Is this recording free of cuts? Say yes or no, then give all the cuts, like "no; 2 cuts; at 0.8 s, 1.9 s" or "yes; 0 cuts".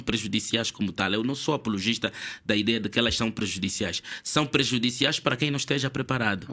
yes; 0 cuts